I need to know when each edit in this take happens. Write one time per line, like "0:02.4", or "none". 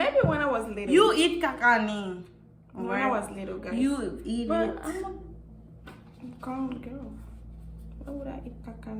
none